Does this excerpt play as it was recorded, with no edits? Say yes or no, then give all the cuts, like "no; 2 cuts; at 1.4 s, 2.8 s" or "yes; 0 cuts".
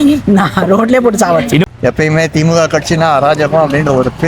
no; 1 cut; at 1.7 s